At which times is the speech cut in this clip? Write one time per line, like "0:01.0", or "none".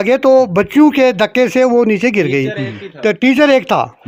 none